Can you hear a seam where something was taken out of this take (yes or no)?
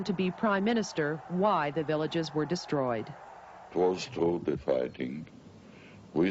no